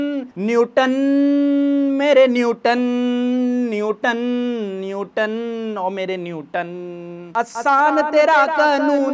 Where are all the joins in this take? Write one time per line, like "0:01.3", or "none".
0:07.2